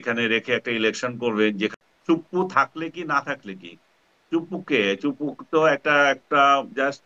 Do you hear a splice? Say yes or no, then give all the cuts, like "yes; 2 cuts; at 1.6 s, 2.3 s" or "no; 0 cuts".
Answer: yes; 1 cut; at 1.7 s